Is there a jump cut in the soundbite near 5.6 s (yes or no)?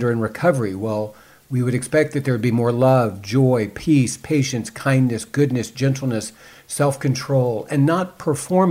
no